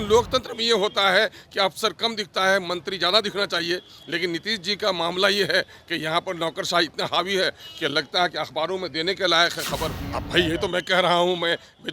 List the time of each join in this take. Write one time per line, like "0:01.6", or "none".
0:10.0